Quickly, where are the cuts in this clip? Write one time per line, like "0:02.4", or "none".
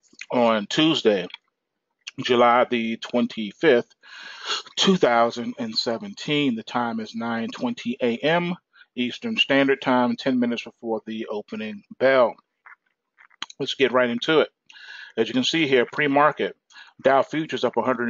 0:07.2